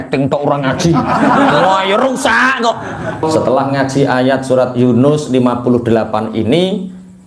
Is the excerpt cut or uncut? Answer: cut